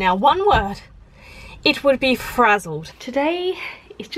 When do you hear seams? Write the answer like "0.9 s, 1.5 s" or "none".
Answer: 3.0 s